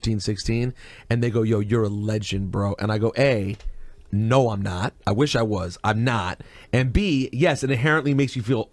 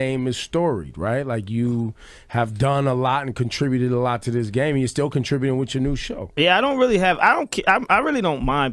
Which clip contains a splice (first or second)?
first